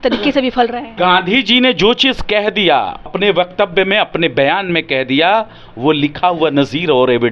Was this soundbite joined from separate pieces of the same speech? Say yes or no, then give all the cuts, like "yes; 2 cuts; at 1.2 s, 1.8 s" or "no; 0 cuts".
yes; 1 cut; at 0.9 s